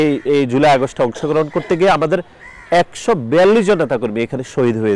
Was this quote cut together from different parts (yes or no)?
no